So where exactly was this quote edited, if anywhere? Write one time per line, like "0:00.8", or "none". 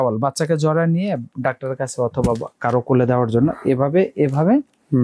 none

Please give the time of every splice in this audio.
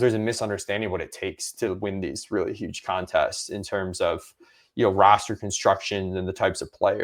none

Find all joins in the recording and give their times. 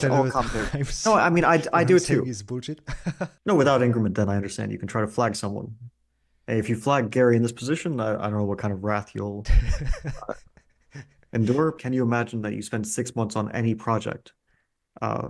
0:03.3
0:11.8

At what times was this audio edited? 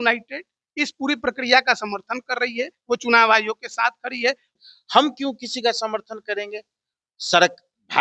0:02.8
0:04.5

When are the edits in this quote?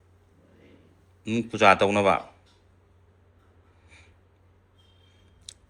none

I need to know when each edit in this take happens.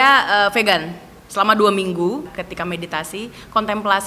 0:02.4

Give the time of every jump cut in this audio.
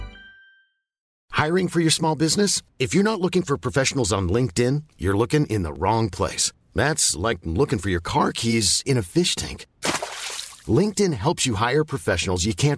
0:01.1

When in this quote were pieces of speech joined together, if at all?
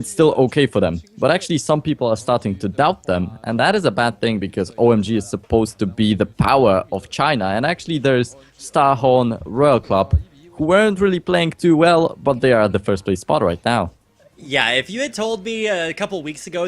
0:15.4

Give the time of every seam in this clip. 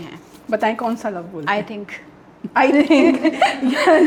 none

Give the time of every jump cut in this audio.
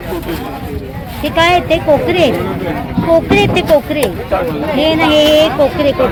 none

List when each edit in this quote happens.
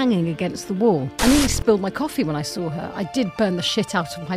0:01.1

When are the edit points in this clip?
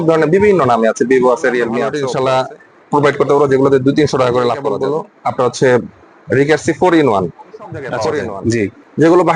0:02.0
0:04.8
0:08.2

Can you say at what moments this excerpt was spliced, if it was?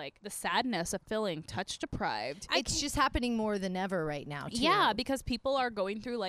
none

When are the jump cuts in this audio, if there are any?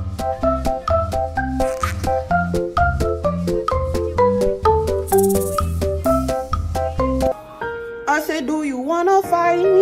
0:07.3

